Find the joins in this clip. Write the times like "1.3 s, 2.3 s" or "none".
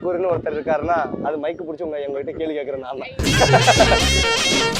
3.3 s